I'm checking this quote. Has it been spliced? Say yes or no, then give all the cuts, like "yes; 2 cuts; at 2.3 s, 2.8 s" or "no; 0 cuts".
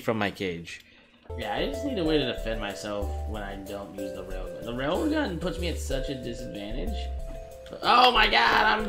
yes; 1 cut; at 1.3 s